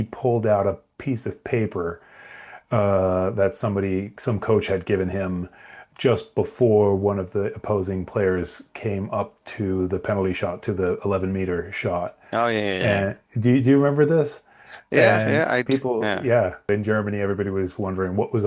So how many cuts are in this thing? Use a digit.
1